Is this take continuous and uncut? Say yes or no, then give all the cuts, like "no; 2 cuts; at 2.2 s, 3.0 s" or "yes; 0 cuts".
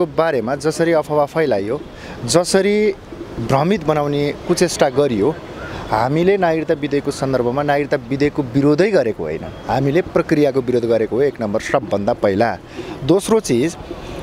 yes; 0 cuts